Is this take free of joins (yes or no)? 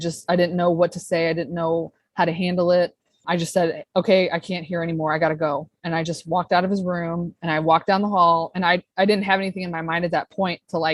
no